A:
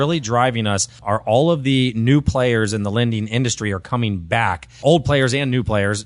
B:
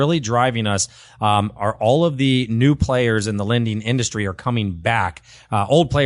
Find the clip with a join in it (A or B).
A